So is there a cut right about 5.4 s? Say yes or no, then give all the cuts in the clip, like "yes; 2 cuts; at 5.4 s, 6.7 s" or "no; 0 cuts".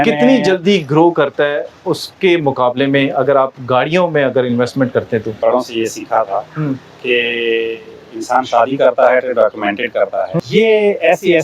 yes; 2 cuts; at 5.4 s, 10.4 s